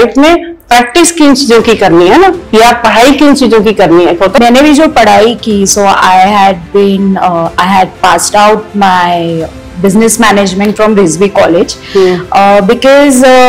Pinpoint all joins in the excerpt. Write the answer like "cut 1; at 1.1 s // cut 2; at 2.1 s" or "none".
cut 1; at 4.4 s

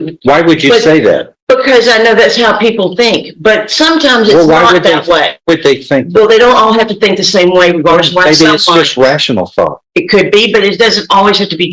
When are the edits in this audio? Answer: none

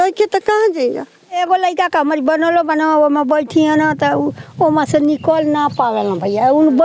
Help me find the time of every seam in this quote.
cut 1; at 1.4 s

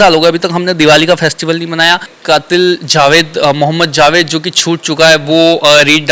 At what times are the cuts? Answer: cut 1; at 2.1 s

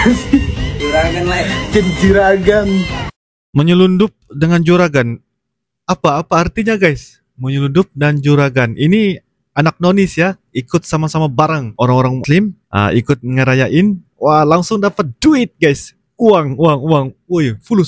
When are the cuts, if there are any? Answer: none

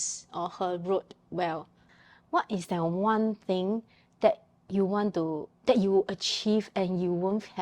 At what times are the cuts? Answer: cut 1; at 1.8 s

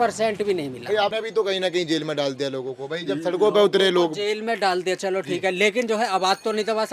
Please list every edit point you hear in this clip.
cut 1; at 1.1 s

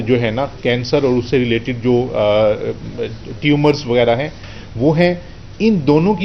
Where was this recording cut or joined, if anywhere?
none

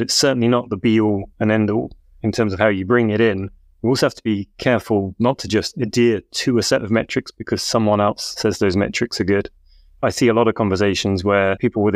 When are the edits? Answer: cut 1; at 2.2 s

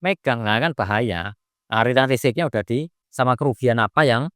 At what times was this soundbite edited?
cut 1; at 3.0 s

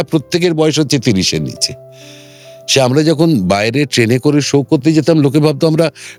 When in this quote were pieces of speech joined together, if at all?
none

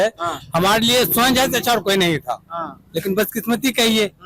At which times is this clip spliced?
none

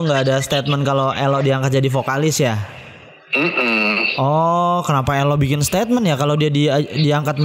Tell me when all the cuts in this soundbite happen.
none

